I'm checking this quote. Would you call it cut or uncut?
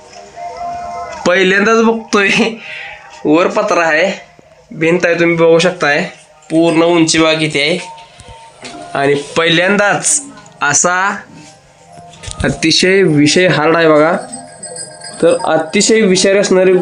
uncut